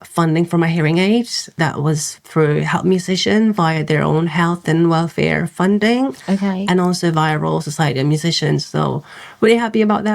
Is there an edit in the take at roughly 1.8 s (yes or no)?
yes